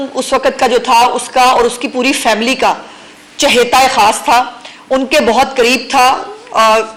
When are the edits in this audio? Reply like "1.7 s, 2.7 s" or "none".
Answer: none